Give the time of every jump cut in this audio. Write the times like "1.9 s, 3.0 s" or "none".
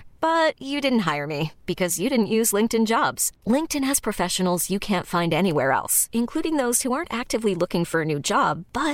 none